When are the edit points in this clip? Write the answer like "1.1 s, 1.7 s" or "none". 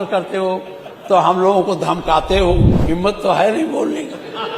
2.8 s

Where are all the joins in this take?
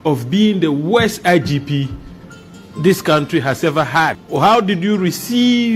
4.2 s

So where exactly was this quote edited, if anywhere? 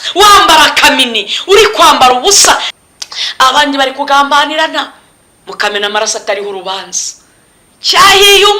2.7 s

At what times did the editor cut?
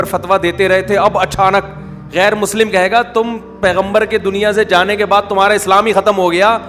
none

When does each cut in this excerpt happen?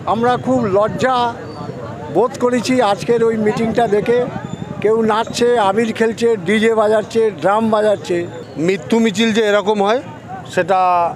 8.4 s

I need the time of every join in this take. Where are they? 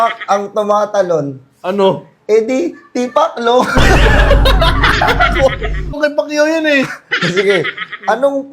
6.0 s

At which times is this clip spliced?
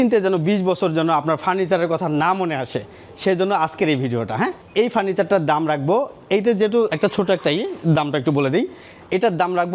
4.6 s

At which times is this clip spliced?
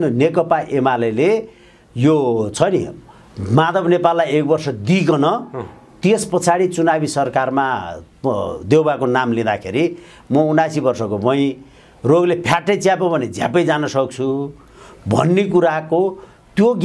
none

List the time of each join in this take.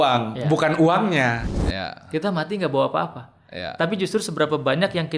1.4 s

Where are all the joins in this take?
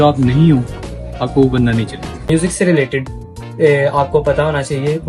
2.2 s

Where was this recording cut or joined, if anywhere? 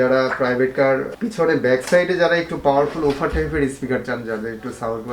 1.1 s

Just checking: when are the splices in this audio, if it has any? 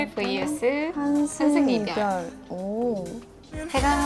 none

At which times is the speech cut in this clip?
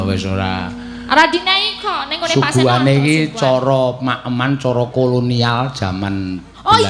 none

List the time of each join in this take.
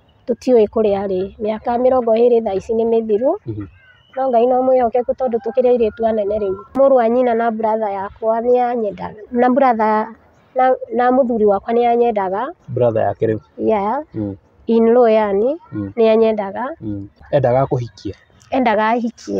6.7 s, 17.1 s

